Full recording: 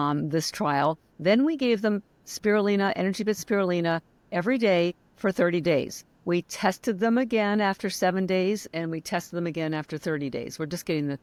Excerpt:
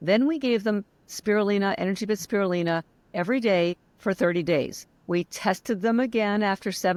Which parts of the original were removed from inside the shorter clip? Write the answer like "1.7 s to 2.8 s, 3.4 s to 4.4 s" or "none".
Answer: none